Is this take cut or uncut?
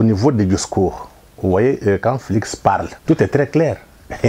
cut